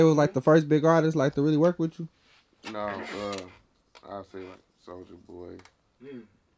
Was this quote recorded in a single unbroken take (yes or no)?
yes